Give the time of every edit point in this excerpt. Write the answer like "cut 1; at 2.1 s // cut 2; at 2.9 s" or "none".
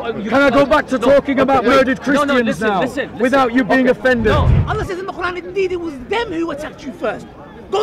cut 1; at 4.6 s